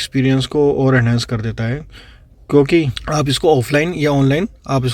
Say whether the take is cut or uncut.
cut